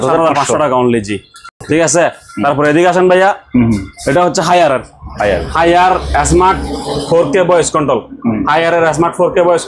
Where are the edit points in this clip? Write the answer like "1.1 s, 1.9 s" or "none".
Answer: none

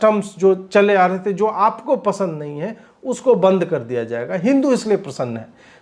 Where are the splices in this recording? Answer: none

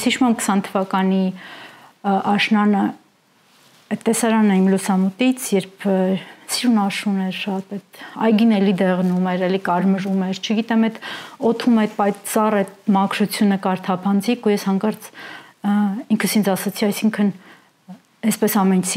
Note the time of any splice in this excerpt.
none

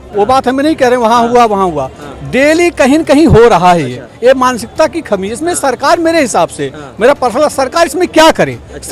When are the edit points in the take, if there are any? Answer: none

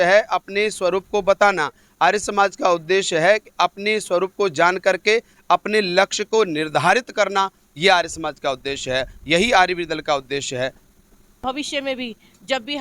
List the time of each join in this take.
11.4 s

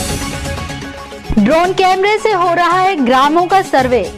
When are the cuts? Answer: none

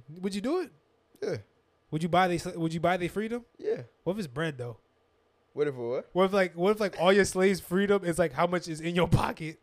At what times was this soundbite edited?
3.5 s

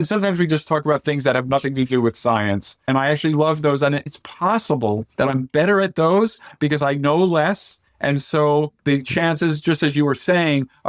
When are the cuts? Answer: none

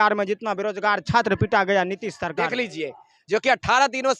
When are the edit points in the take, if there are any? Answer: 2.3 s

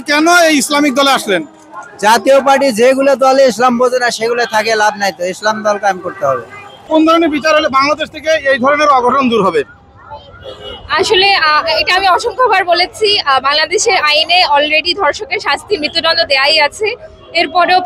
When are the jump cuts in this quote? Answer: none

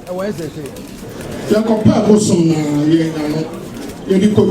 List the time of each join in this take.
1.3 s

